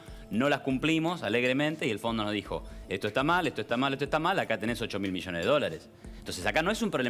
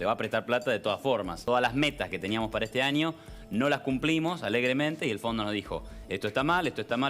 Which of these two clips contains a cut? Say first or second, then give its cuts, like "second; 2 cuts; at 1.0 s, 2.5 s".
second; 1 cut; at 1.4 s